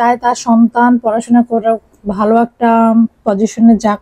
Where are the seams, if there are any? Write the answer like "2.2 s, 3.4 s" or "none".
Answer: none